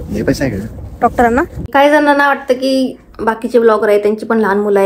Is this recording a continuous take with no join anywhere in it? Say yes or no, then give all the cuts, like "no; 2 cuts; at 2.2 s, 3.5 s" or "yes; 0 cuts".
no; 1 cut; at 1.7 s